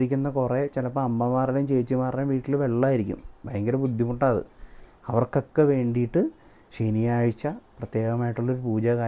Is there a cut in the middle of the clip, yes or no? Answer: no